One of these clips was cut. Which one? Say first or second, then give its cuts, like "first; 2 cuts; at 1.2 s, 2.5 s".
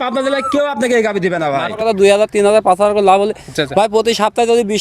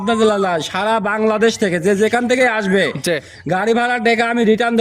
first; 1 cut; at 1.8 s